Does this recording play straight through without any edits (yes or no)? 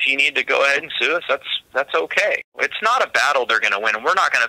no